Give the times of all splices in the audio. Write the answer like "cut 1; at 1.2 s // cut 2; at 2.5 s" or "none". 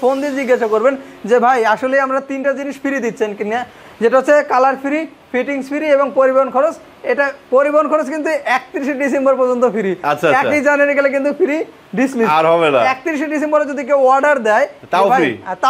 none